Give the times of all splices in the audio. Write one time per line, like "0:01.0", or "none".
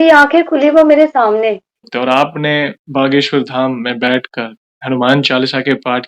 0:01.9